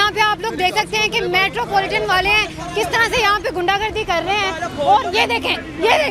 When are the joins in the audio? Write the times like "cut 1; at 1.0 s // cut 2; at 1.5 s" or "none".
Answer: none